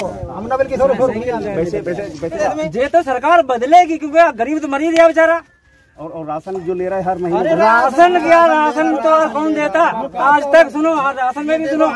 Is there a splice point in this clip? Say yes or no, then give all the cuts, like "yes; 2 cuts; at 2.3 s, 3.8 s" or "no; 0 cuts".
yes; 1 cut; at 2.4 s